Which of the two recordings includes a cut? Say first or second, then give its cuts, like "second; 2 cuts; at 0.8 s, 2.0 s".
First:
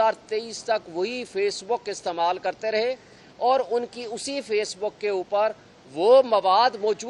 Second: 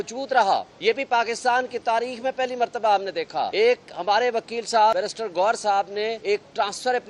second; 4 cuts; at 1.1 s, 3.5 s, 4.9 s, 6.2 s